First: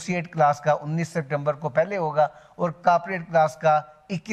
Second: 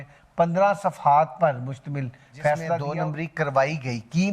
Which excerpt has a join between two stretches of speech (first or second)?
second